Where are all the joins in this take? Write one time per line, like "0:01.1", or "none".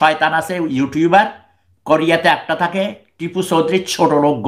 none